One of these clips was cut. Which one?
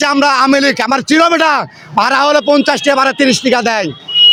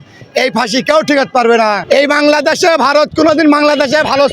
second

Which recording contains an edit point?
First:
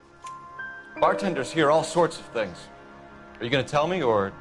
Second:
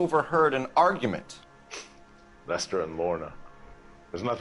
first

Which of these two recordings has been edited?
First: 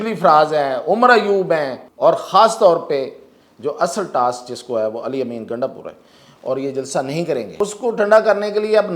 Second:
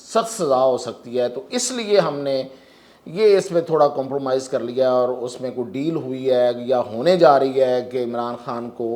first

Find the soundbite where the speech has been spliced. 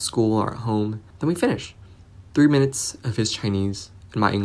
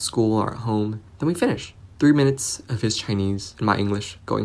second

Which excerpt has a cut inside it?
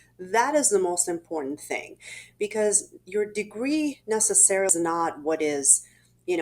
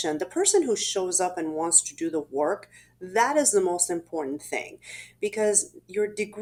first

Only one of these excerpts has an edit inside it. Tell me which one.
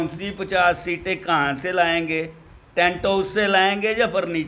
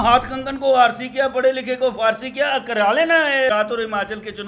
second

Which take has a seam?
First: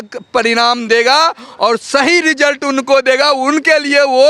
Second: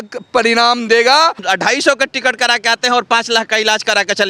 second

